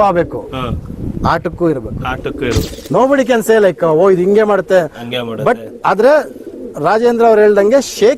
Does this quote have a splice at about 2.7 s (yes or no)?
yes